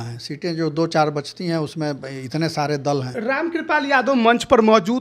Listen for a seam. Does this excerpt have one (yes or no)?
yes